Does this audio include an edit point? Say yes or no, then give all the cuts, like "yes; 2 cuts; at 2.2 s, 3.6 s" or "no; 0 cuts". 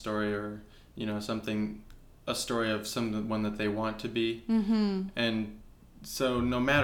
no; 0 cuts